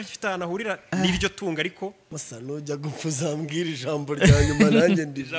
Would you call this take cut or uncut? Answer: cut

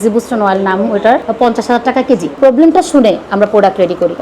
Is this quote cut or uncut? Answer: cut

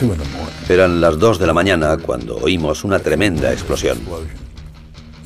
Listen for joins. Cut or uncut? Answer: uncut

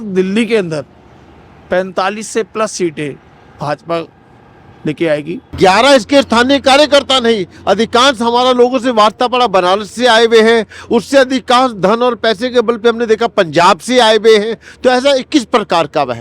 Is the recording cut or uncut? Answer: cut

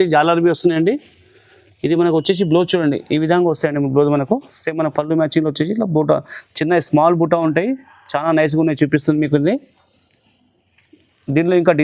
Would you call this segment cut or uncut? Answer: uncut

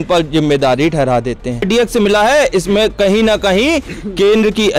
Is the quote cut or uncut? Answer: cut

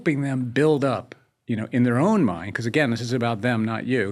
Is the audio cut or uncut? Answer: uncut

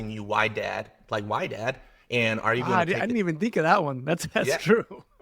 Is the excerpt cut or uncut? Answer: uncut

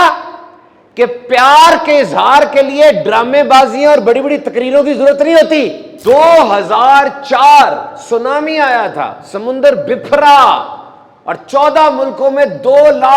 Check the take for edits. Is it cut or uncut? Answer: cut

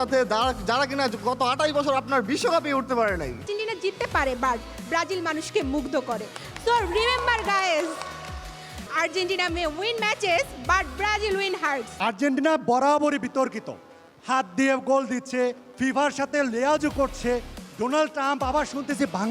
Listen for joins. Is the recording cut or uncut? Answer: cut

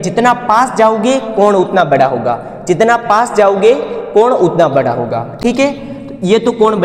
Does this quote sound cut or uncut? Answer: uncut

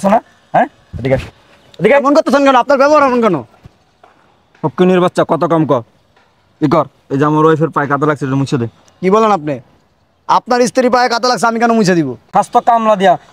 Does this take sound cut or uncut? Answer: cut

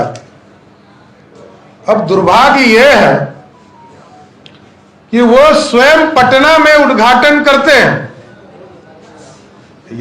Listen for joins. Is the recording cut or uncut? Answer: uncut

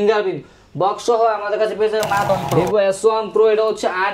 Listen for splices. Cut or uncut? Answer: cut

